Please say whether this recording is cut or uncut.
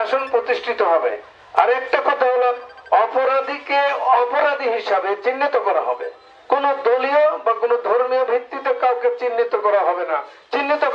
uncut